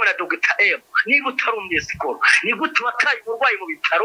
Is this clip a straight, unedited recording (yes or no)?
yes